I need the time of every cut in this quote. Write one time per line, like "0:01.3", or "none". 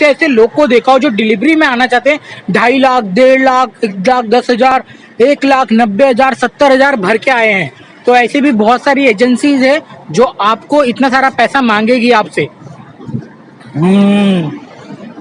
none

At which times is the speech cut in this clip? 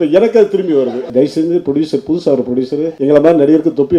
0:01.1

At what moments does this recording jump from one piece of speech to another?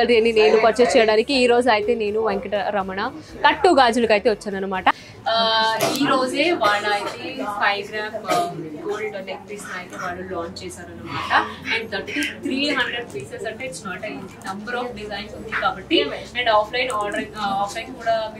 0:05.0

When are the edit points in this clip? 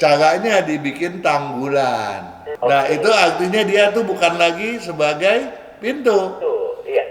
0:02.4

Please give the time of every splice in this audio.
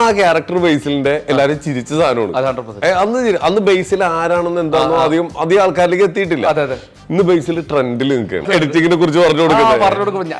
0:08.5

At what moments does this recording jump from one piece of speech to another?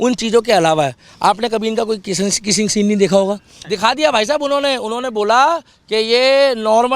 0:03.5

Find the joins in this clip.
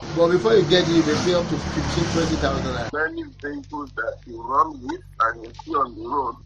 0:02.9

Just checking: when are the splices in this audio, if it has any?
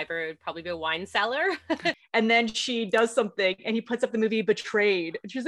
0:01.9

